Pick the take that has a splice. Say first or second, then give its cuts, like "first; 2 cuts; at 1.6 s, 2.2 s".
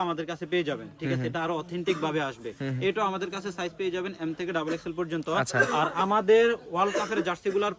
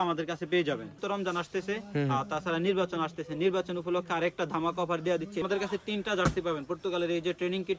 second; 2 cuts; at 1.0 s, 5.4 s